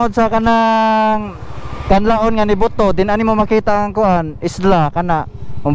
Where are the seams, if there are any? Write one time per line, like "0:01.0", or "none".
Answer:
none